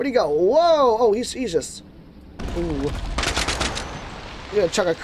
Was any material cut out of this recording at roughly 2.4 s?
yes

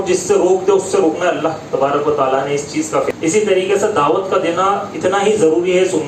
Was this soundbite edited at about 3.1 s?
yes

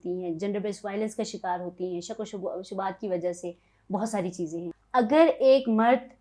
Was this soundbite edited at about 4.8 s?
yes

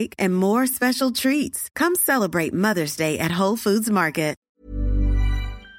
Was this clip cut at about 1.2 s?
no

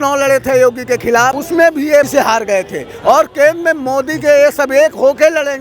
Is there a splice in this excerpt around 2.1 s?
yes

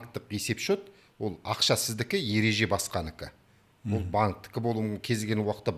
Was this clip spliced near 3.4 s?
no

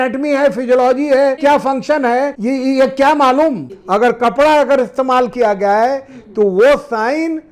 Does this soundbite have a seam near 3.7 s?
yes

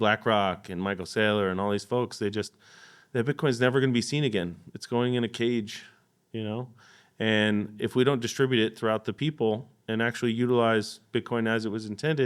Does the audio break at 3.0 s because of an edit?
no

